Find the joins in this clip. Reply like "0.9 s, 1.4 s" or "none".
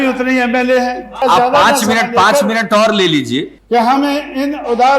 1.2 s, 3.5 s